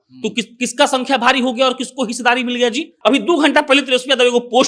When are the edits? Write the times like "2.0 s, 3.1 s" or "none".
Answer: 2.9 s